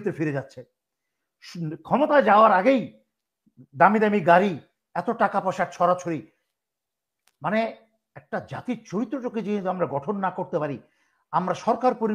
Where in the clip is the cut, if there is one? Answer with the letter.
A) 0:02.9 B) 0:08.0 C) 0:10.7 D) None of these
D